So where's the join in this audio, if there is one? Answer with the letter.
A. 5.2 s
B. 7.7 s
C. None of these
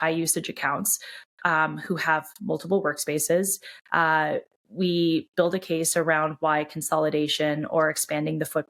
C